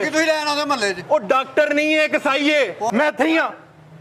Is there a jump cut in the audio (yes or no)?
yes